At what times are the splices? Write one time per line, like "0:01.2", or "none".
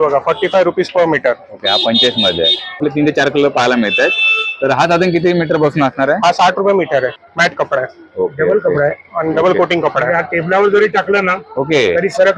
0:02.8
0:07.2